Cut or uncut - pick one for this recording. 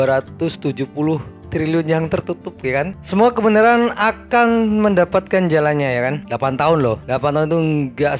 cut